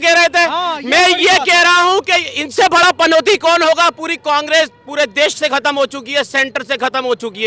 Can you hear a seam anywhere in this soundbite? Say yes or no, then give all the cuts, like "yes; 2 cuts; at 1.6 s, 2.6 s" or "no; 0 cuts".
no; 0 cuts